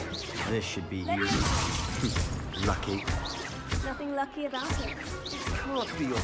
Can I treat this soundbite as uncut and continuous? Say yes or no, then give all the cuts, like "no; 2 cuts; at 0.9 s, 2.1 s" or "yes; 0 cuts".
yes; 0 cuts